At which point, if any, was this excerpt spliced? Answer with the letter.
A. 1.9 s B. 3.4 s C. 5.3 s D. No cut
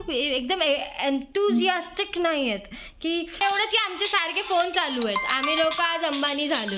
B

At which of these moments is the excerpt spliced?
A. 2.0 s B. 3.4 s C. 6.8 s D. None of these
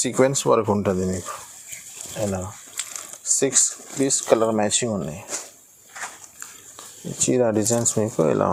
D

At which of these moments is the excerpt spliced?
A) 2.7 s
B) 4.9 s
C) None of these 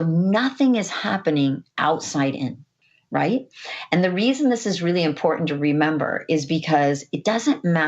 A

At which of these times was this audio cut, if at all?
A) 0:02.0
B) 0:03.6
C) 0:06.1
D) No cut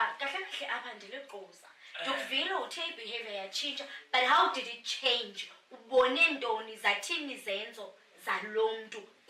D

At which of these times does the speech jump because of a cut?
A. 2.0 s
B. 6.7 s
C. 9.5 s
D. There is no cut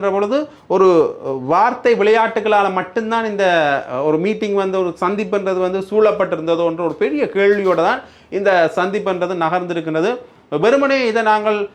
D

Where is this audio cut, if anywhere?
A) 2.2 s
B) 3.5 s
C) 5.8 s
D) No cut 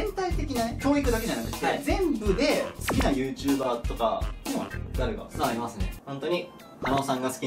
C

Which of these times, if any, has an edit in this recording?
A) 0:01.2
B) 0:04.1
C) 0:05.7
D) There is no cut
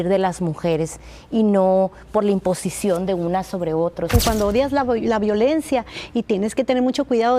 B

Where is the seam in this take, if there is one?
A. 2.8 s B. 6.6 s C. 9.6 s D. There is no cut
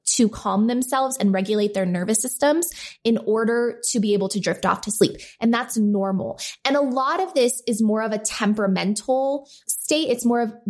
C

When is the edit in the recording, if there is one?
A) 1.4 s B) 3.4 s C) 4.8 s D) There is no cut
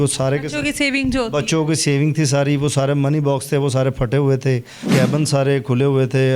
C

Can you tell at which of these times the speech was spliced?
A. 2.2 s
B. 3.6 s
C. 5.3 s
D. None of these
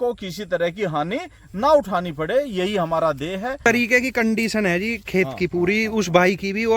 B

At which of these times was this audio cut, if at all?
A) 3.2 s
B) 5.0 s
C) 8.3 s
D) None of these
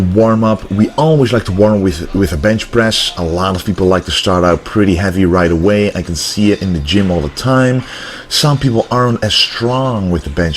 B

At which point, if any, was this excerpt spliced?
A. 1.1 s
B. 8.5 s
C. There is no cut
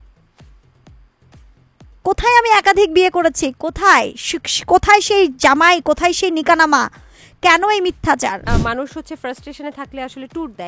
B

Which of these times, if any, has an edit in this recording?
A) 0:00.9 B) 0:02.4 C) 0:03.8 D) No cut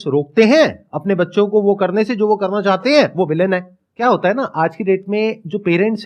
C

